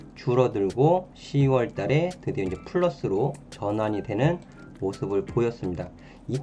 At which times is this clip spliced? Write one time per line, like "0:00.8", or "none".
0:01.2

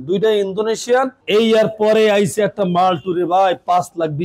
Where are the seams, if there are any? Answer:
0:01.2

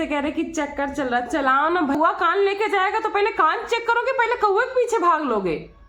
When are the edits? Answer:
0:01.9

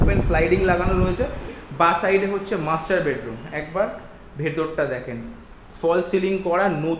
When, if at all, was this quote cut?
0:01.6

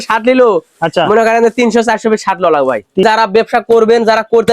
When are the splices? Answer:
0:03.0

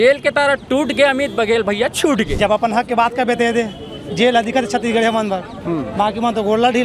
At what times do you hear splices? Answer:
0:02.3

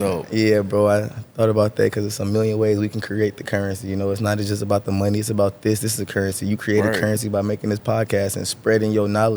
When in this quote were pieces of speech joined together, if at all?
none

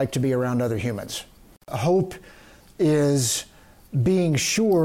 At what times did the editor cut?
0:01.7

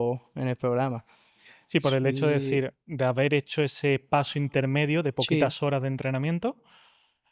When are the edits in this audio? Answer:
none

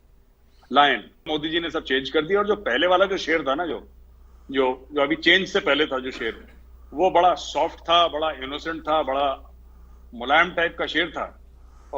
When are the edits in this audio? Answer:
0:01.3

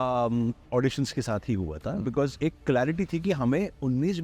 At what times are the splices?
0:02.3

